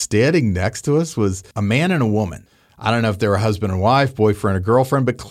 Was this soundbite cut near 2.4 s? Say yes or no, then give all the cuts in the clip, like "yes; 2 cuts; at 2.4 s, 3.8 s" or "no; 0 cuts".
yes; 2 cuts; at 1.5 s, 2.4 s